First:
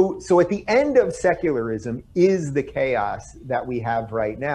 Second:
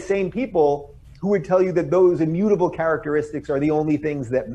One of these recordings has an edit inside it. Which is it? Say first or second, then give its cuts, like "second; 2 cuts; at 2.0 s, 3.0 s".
first; 1 cut; at 3.6 s